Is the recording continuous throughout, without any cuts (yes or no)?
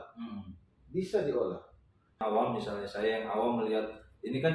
no